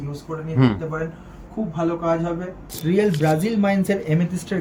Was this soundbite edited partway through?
yes; 1 cut; at 2.7 s

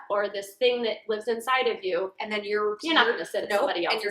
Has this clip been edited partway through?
no; 0 cuts

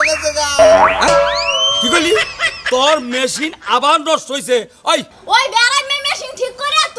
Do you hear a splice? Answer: yes; 1 cut; at 5.1 s

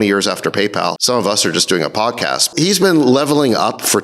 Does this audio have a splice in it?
yes; 2 cuts; at 1.0 s, 2.4 s

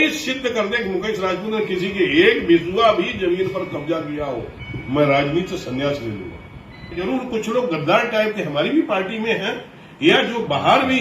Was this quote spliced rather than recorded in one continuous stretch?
yes; 1 cut; at 7.0 s

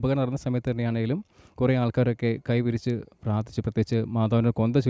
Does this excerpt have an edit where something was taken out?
no; 0 cuts

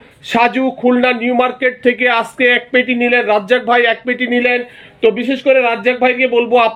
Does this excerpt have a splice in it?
no; 0 cuts

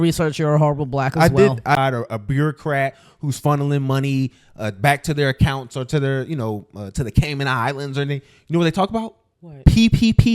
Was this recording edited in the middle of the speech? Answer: yes; 1 cut; at 1.8 s

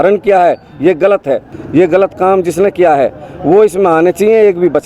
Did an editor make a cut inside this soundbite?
yes; 1 cut; at 1.5 s

